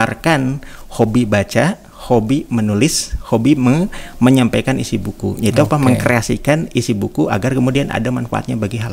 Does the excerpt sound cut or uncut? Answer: uncut